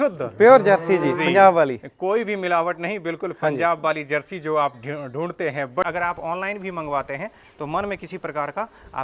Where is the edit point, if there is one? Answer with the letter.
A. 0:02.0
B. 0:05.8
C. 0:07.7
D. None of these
B